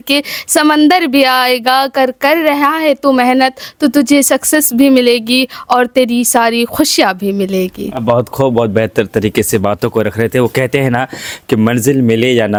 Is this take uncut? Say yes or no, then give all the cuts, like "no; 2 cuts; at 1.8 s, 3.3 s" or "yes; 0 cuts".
yes; 0 cuts